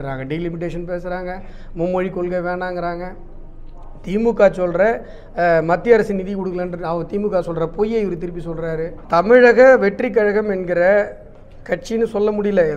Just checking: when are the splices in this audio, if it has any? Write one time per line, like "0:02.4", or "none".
0:09.0